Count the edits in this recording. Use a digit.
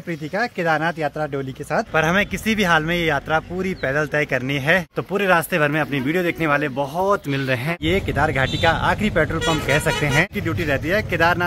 4